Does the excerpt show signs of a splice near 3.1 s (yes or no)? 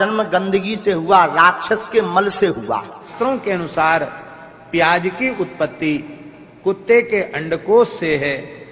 yes